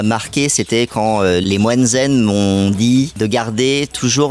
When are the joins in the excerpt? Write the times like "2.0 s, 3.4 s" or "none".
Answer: 1.4 s, 3.1 s